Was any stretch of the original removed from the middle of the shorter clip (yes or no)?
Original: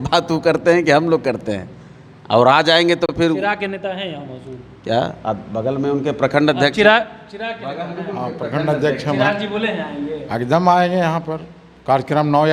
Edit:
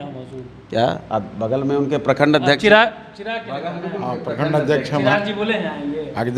no